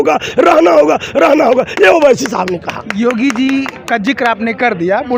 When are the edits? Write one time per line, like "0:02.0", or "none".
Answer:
none